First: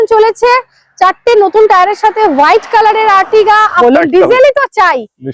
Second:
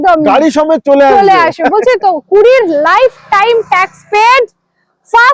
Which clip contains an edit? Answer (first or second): first